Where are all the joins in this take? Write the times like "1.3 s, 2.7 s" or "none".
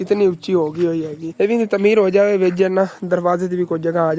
1.2 s